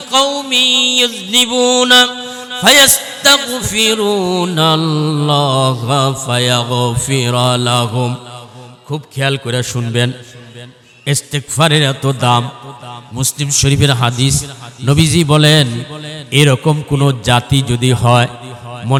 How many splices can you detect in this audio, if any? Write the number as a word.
zero